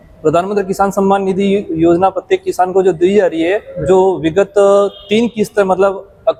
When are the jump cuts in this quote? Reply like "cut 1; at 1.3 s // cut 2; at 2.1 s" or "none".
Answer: none